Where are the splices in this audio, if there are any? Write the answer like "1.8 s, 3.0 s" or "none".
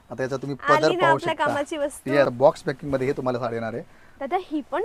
2.3 s